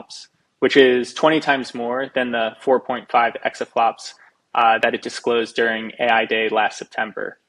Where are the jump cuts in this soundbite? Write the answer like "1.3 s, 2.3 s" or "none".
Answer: none